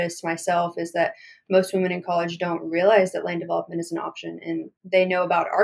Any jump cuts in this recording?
yes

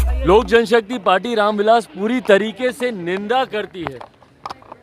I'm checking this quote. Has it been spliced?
no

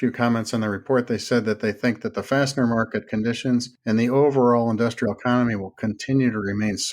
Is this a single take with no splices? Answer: no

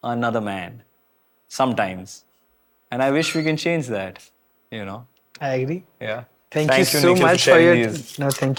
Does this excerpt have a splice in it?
no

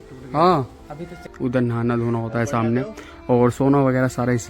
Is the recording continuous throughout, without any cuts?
no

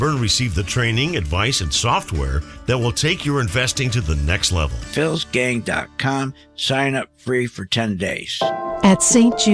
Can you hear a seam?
yes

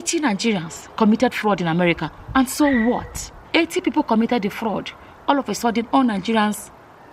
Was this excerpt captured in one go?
no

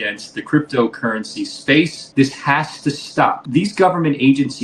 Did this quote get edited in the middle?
yes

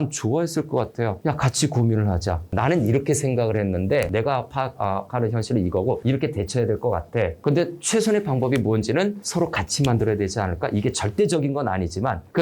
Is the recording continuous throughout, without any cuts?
no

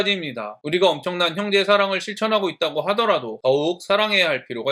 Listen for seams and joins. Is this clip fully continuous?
yes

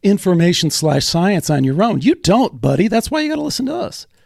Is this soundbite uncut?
yes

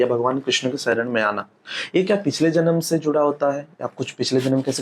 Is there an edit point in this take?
no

